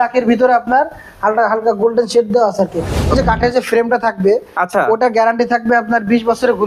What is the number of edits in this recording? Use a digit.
1